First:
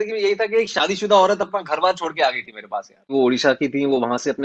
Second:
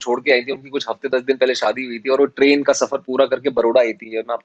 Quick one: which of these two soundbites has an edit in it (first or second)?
first